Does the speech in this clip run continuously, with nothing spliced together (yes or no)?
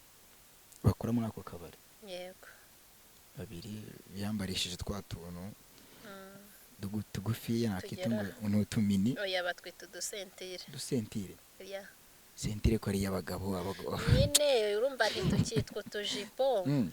yes